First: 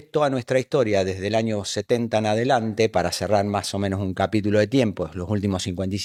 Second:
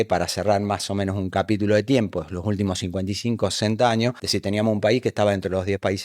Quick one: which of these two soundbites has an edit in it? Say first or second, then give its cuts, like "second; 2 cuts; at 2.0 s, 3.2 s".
second; 1 cut; at 4.3 s